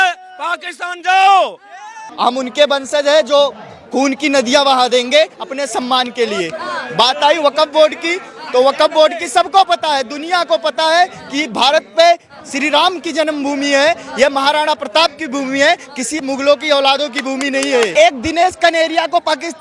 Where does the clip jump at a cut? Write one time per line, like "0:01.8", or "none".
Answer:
0:02.1
0:17.9

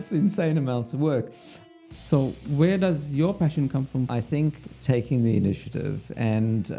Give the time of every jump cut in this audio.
0:01.6
0:04.1

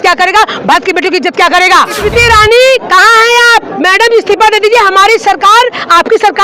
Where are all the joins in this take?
0:02.0

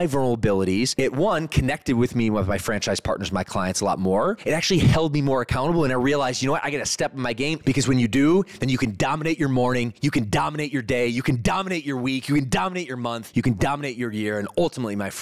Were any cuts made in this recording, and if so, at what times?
0:00.9
0:04.4
0:07.6
0:13.2

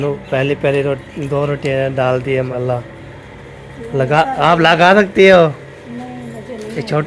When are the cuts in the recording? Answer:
0:02.5

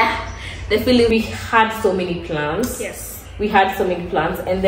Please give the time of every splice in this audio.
0:01.1

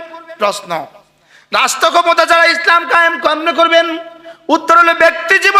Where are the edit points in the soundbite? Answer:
none

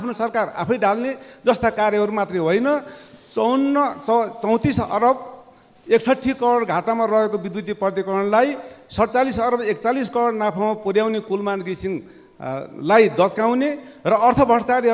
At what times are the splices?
none

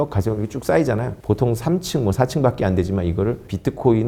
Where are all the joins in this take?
none

